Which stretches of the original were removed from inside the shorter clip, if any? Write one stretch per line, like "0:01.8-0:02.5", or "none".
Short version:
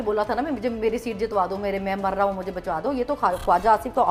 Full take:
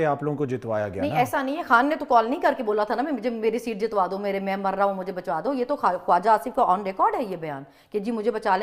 none